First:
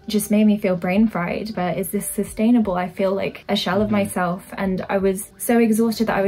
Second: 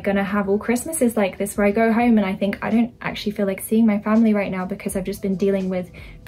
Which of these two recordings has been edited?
first; 3 cuts; at 1.5 s, 3.4 s, 5.3 s

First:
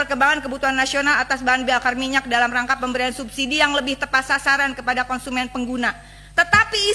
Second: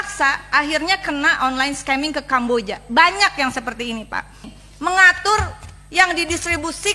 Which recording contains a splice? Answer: second; 1 cut; at 4.6 s

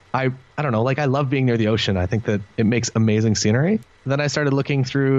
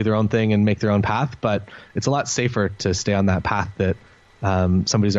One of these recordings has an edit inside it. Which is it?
first; 2 cuts; at 2.5 s, 3.9 s

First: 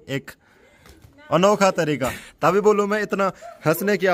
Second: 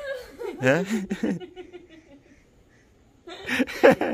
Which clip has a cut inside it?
first; 1 cut; at 2.2 s

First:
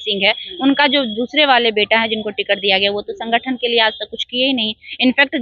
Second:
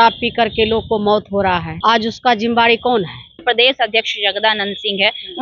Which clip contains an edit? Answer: second; 1 cut; at 3.4 s

